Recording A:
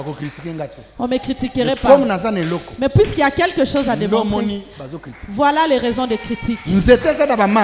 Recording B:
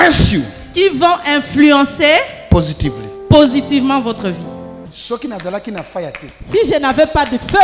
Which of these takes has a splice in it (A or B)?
B